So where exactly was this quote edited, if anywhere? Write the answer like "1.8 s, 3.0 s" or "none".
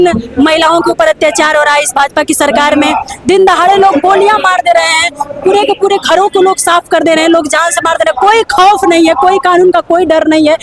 none